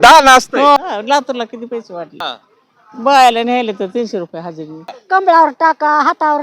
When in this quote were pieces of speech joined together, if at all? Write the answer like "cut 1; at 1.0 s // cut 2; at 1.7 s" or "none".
cut 1; at 0.8 s // cut 2; at 2.2 s // cut 3; at 4.9 s

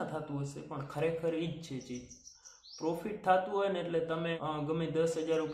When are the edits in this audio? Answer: cut 1; at 4.4 s

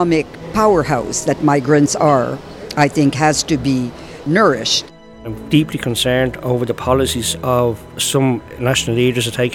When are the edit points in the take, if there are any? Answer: cut 1; at 4.9 s

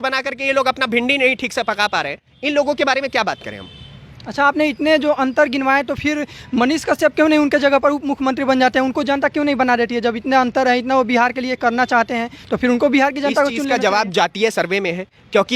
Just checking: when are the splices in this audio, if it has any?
none

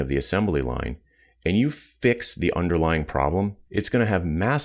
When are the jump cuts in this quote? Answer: cut 1; at 3.6 s

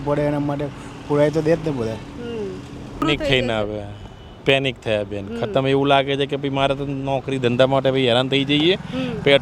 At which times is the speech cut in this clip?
cut 1; at 3.0 s

